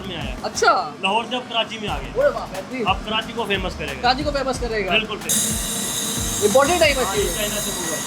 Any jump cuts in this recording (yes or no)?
yes